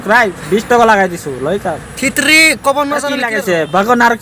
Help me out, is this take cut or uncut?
cut